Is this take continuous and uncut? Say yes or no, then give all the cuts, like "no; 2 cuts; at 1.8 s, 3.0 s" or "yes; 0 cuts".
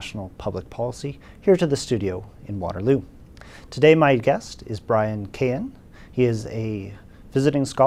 yes; 0 cuts